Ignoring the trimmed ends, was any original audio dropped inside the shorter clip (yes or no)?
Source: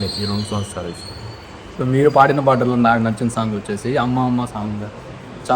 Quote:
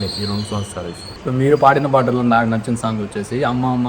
yes